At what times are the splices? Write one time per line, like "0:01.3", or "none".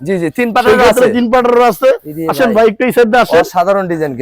none